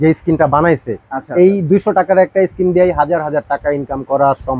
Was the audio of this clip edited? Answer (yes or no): no